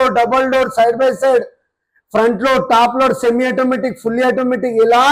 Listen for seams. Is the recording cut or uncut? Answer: uncut